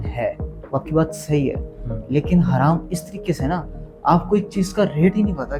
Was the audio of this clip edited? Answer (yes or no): no